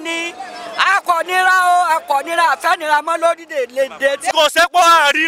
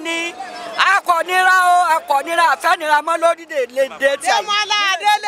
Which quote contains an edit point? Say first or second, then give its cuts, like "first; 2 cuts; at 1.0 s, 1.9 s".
first; 1 cut; at 4.3 s